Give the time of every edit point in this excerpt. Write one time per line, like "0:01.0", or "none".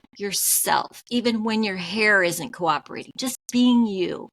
0:01.0